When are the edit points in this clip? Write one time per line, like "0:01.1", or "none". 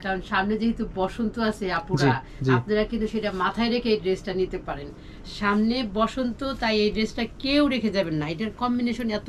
none